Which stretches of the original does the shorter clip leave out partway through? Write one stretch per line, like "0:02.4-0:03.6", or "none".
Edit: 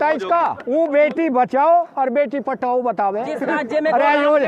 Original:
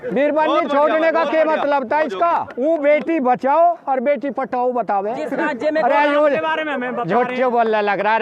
none